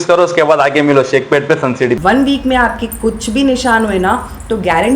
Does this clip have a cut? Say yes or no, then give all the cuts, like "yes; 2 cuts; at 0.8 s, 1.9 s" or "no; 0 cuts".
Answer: yes; 1 cut; at 2.0 s